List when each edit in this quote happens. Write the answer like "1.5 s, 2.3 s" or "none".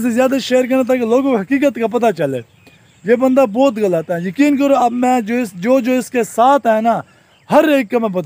none